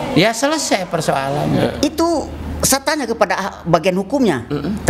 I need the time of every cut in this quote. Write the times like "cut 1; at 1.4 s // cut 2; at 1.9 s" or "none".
cut 1; at 1.7 s